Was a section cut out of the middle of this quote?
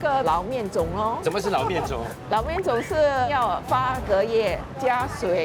no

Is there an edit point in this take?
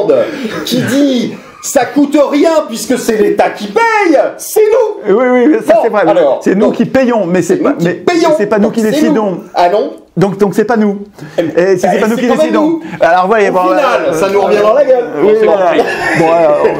no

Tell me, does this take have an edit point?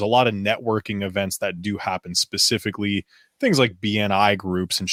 no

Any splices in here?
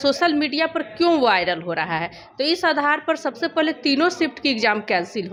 no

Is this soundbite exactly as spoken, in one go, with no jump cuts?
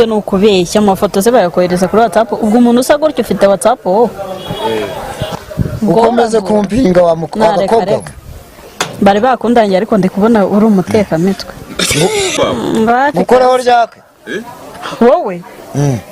no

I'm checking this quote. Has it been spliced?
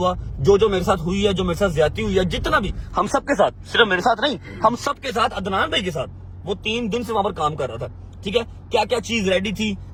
no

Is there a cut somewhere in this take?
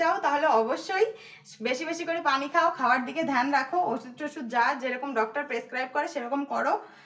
no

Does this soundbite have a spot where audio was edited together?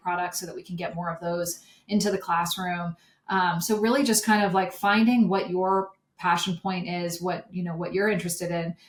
no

